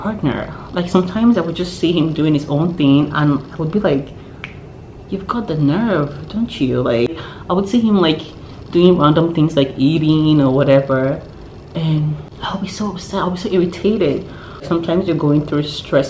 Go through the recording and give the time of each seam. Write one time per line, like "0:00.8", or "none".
0:07.3
0:12.3